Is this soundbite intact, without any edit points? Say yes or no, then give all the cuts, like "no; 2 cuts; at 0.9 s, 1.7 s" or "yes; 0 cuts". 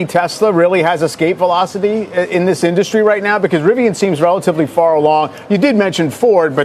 yes; 0 cuts